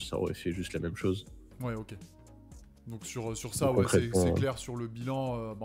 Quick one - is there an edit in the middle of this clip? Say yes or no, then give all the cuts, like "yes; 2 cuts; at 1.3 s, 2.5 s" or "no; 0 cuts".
no; 0 cuts